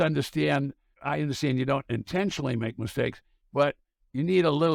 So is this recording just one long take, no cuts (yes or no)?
no